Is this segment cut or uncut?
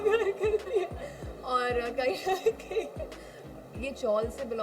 cut